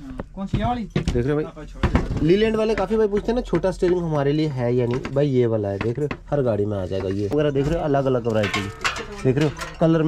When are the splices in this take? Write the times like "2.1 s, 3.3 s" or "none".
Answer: 7.3 s